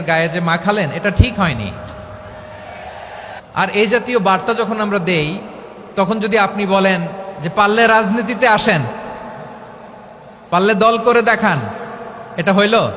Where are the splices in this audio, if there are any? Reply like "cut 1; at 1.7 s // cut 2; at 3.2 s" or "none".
cut 1; at 3.4 s